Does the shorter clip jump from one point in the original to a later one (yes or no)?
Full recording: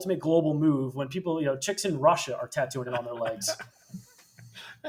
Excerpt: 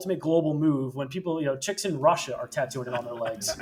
no